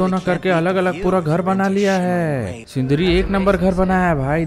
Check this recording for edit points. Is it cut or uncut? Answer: cut